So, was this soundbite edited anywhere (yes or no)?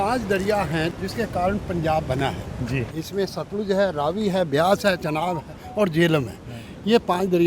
yes